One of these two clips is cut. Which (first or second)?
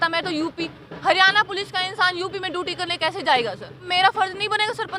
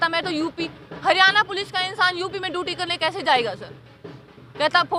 first